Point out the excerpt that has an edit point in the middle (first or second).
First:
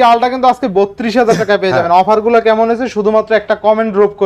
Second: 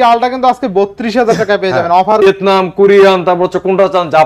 second